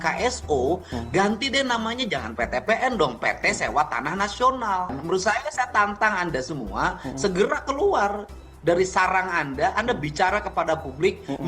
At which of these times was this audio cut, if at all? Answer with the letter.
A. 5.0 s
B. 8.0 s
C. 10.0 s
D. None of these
A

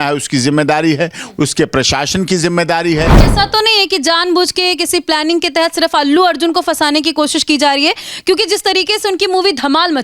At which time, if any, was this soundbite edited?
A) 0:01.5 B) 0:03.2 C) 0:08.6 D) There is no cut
B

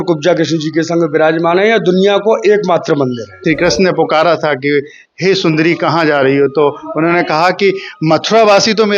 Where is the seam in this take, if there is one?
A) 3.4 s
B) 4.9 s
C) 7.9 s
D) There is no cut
A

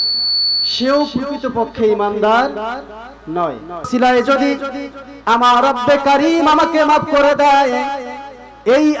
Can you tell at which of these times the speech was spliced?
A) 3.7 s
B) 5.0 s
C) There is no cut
A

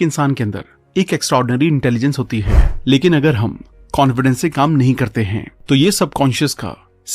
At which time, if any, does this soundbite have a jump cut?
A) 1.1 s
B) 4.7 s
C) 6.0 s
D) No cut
D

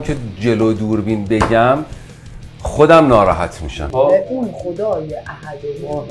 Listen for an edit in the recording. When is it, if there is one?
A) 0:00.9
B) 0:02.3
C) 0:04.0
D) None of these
C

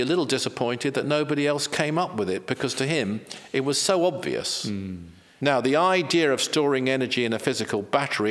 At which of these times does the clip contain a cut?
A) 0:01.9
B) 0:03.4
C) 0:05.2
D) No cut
C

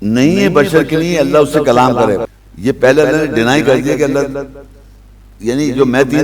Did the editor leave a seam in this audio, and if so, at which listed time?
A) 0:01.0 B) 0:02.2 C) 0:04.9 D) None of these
B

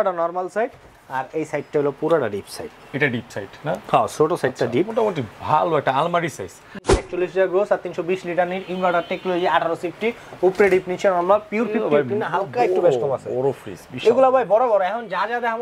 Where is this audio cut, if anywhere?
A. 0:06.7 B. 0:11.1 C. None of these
A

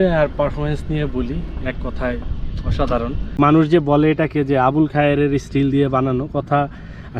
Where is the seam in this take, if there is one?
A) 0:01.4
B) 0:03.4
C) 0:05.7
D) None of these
B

